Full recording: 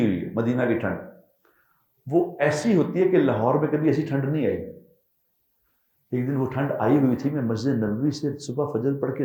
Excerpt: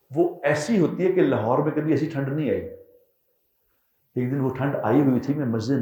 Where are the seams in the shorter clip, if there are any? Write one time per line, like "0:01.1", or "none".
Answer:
none